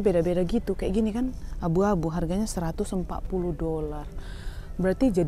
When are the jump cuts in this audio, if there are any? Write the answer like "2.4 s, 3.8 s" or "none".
none